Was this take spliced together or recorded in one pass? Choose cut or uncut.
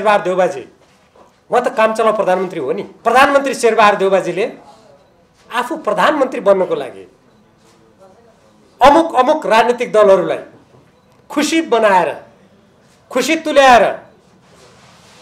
cut